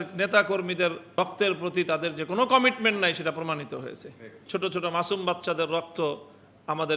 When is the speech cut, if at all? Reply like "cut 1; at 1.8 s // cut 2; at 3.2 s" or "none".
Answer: cut 1; at 1.1 s // cut 2; at 4.4 s

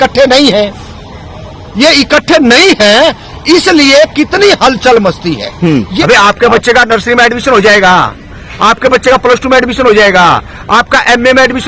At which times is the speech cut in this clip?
cut 1; at 5.9 s

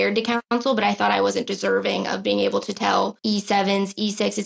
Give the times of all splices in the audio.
cut 1; at 3.2 s

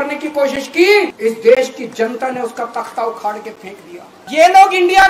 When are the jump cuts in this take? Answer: cut 1; at 1.1 s // cut 2; at 4.2 s

